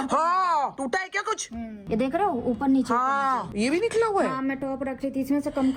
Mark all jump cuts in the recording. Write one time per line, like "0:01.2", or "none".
0:01.8
0:03.4